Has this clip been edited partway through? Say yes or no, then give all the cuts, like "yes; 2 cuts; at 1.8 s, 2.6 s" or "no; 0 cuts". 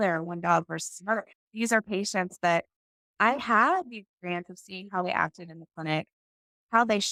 no; 0 cuts